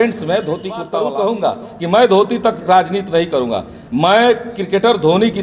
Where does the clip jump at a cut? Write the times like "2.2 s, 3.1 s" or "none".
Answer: 0.9 s

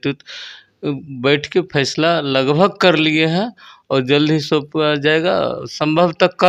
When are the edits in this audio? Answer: none

